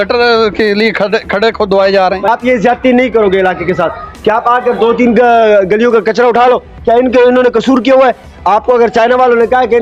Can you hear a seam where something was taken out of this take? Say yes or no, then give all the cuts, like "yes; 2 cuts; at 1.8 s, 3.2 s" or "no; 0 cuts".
yes; 1 cut; at 2.3 s